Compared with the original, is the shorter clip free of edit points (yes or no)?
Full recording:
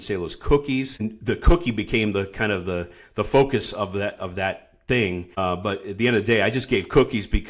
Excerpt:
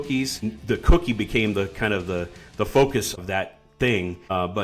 no